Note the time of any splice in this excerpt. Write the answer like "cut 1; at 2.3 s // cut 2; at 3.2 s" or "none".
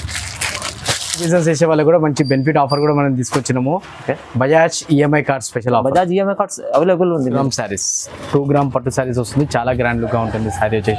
cut 1; at 1.3 s // cut 2; at 7.3 s